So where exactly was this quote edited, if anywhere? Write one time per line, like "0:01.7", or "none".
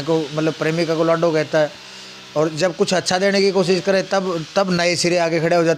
none